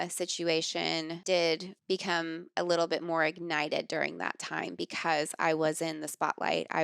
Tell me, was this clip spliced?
yes; 2 cuts; at 1.1 s, 1.7 s

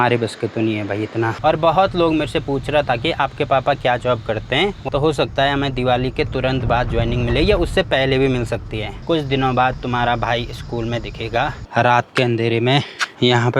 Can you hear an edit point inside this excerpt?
yes; 3 cuts; at 4.9 s, 8.9 s, 11.6 s

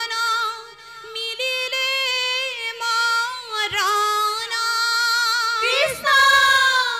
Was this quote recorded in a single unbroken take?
yes; 0 cuts

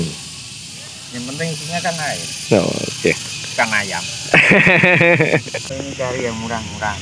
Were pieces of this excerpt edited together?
yes; 1 cut; at 5.6 s

